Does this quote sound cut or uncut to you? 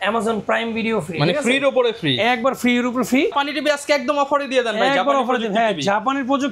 uncut